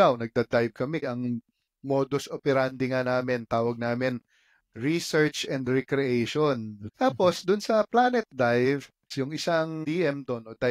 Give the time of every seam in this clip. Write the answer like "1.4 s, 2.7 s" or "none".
1.0 s, 6.8 s, 9.1 s, 9.8 s